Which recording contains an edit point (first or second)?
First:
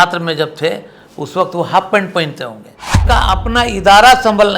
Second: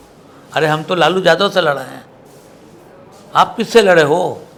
first